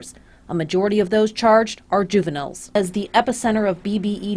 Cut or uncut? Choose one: cut